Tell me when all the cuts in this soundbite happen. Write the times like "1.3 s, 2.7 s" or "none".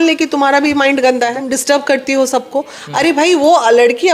1.4 s